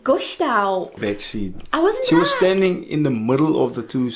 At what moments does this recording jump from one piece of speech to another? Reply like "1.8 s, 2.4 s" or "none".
1.0 s

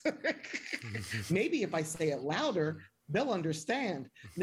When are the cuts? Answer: none

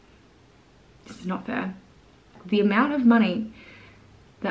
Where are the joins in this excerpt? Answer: 2.4 s

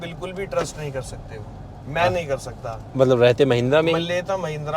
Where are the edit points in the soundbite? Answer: 2.8 s

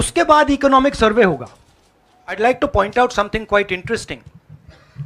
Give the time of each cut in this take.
2.4 s

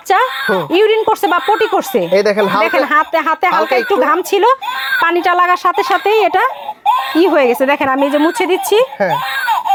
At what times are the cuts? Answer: none

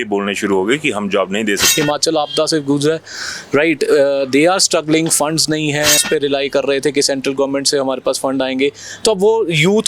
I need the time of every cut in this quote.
1.7 s, 6.0 s

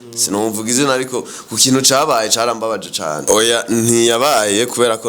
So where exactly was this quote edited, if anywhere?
3.2 s

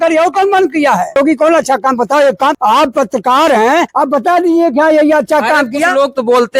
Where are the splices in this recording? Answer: 1.2 s, 2.6 s, 3.9 s

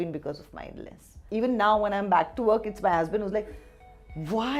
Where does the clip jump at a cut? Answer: 1.2 s

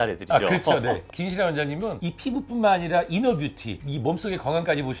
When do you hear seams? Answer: 1.1 s

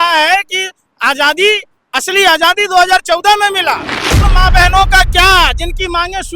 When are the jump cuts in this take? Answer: 4.2 s

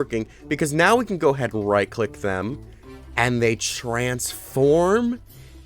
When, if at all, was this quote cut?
none

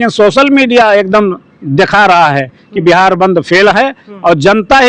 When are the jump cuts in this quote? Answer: none

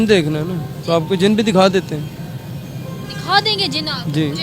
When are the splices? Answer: none

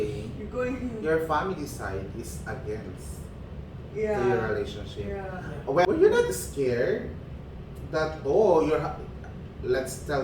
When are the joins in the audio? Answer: 5.9 s

